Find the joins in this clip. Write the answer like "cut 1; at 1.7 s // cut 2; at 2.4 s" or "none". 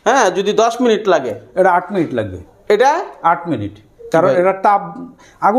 none